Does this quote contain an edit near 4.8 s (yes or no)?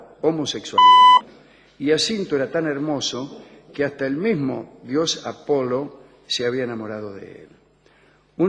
no